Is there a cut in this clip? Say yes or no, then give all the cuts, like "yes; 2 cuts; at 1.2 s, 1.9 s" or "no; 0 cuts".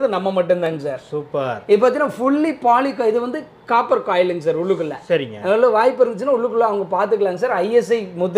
no; 0 cuts